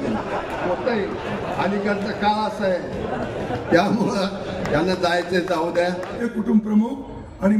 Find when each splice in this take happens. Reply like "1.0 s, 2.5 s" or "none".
6.2 s